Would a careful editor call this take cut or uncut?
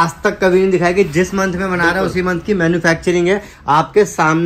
uncut